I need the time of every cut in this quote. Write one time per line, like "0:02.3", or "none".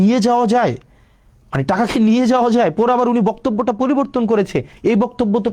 none